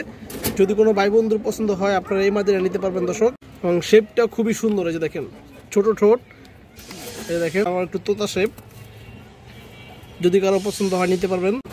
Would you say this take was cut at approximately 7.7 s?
yes; 2 cuts; at 3.5 s, 7.7 s

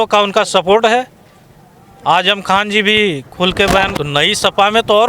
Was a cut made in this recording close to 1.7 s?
no; 1 cut; at 3.9 s

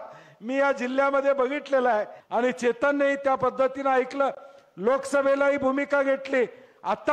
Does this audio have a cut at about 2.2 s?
yes; 1 cut; at 2.2 s

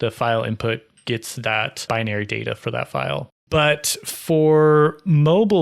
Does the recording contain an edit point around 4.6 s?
no; 2 cuts; at 1.8 s, 3.4 s

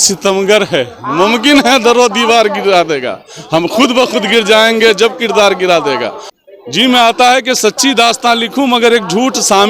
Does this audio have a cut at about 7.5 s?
no; 1 cut; at 6.2 s

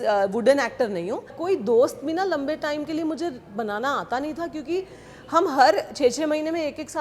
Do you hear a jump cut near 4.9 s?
no; 1 cut; at 1.4 s

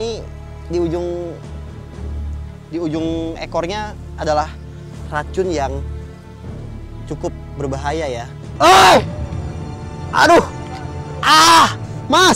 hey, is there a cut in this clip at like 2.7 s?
no; 1 cut; at 8.5 s

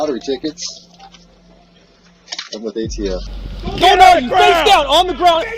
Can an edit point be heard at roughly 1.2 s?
no; 1 cut; at 3.3 s

